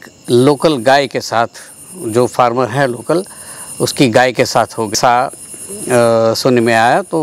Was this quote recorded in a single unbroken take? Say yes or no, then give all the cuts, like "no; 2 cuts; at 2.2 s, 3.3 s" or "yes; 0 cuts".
no; 1 cut; at 5.0 s